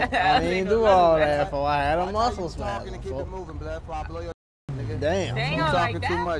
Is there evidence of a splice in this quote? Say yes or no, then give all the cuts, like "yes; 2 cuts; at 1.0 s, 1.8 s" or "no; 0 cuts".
no; 0 cuts